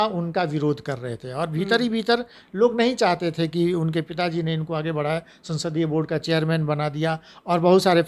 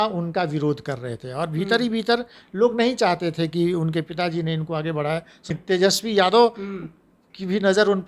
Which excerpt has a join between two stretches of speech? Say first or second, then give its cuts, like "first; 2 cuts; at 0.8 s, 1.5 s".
second; 1 cut; at 5.6 s